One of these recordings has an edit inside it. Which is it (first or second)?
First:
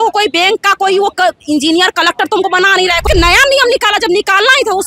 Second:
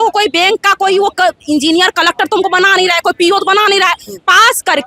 first